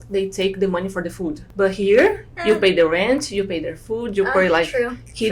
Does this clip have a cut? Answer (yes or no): yes